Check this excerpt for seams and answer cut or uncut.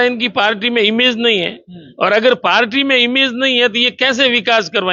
uncut